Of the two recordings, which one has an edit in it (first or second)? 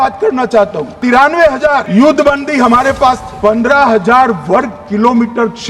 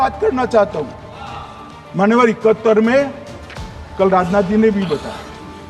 first